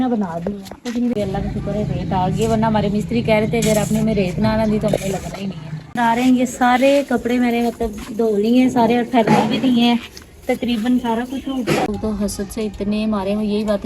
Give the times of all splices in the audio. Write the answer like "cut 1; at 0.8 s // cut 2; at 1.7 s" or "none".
cut 1; at 1.1 s // cut 2; at 5.9 s // cut 3; at 11.9 s